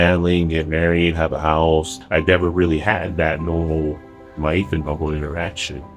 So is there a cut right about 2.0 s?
yes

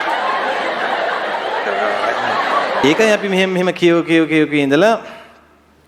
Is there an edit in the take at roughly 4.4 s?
no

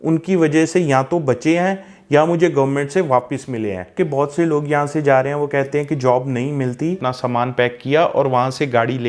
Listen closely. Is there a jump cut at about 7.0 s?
yes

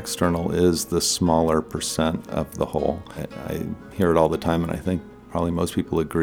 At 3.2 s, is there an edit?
yes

